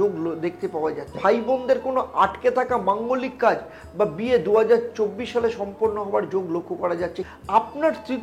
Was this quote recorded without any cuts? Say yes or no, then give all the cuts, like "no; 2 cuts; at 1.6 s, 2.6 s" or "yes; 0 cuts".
no; 2 cuts; at 1.2 s, 7.2 s